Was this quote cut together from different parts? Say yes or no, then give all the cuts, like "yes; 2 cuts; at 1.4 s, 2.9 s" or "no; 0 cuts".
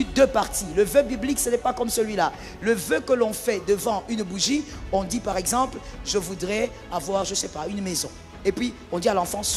no; 0 cuts